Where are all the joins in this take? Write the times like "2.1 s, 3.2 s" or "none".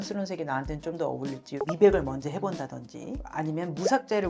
1.6 s